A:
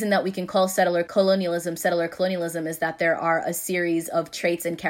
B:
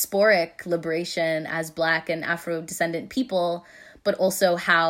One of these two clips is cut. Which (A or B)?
A